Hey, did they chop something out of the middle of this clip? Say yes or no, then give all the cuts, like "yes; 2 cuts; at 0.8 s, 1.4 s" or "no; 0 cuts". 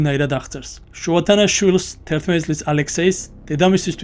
no; 0 cuts